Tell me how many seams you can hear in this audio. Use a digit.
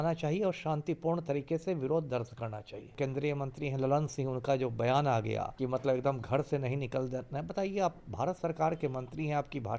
2